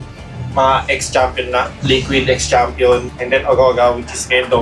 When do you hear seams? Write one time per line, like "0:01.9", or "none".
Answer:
0:01.7
0:03.1